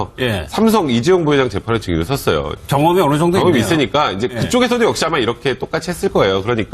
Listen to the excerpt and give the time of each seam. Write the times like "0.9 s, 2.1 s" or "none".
4.4 s